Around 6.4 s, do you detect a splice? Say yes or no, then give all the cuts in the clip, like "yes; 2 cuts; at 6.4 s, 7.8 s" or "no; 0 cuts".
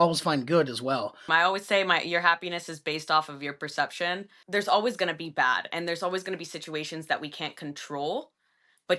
no; 2 cuts; at 1.3 s, 4.3 s